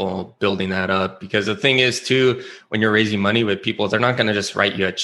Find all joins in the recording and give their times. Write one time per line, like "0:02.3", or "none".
none